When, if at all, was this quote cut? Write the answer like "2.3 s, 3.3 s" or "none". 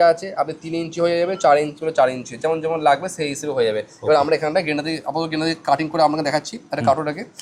none